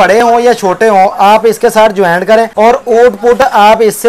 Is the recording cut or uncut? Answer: cut